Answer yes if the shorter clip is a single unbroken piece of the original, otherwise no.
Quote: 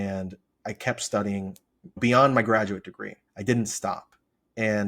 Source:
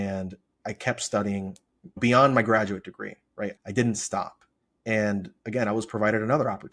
no